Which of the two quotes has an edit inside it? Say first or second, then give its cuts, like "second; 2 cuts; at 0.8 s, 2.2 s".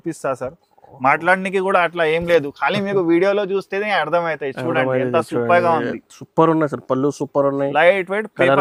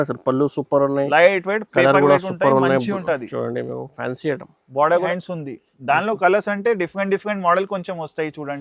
second; 1 cut; at 5.1 s